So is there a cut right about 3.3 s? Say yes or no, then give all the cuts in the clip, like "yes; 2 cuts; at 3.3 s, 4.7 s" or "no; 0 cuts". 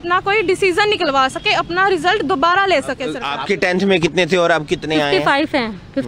yes; 1 cut; at 3.3 s